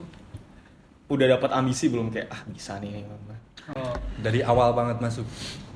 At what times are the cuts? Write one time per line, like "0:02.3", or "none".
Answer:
none